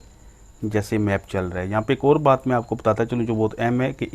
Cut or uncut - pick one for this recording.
uncut